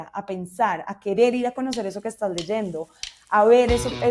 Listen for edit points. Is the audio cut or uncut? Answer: uncut